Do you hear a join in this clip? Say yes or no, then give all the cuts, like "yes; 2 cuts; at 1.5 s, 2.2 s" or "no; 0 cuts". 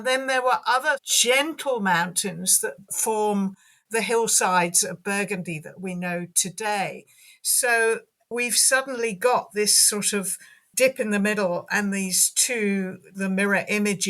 yes; 1 cut; at 1.1 s